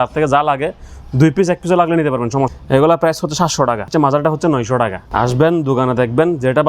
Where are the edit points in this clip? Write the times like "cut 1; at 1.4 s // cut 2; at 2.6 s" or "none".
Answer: cut 1; at 2.5 s // cut 2; at 3.8 s // cut 3; at 5.0 s